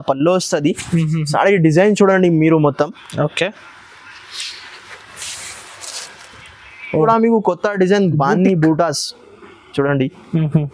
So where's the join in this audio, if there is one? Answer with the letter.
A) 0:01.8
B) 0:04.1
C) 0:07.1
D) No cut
C